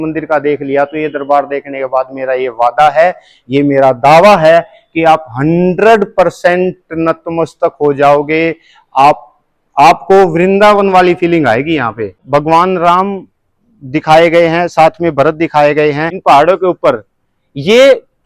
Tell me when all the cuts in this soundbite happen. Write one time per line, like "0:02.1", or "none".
0:12.2
0:16.1